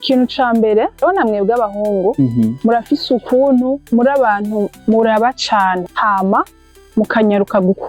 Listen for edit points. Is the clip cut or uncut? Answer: cut